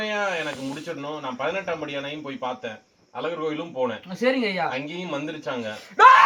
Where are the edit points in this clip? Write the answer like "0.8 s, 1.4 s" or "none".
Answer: none